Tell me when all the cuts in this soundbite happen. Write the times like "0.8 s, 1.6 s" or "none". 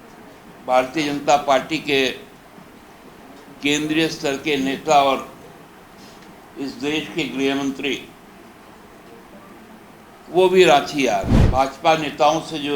11.4 s